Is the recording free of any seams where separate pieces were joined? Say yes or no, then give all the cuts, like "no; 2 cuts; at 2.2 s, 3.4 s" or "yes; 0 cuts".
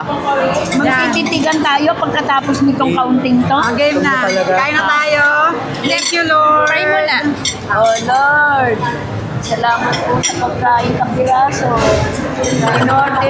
yes; 0 cuts